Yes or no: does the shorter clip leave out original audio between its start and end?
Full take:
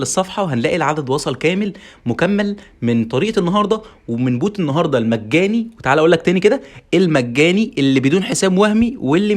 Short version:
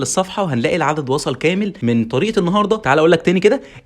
yes